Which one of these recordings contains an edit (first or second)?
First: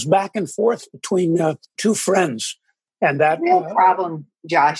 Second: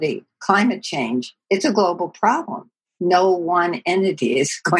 first